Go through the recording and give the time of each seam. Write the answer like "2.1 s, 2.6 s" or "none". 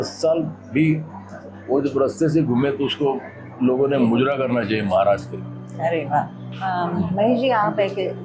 none